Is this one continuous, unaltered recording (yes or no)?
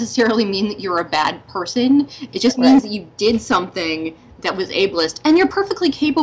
yes